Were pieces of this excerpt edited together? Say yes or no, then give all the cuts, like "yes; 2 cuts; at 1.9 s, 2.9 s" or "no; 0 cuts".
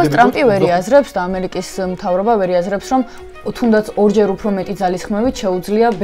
no; 0 cuts